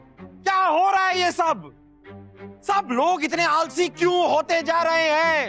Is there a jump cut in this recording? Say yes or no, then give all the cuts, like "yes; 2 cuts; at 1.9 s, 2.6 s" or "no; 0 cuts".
no; 0 cuts